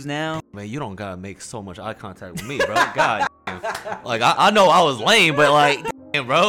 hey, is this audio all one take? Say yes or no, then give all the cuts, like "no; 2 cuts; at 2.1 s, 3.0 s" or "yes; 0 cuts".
yes; 0 cuts